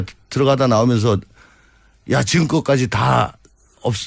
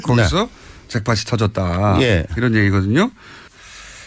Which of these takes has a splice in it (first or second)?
first